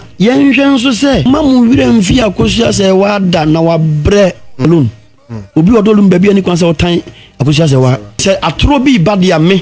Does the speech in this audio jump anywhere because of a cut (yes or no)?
yes